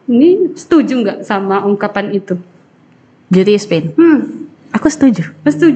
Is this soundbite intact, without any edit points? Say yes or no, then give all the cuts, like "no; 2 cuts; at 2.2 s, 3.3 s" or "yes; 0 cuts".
yes; 0 cuts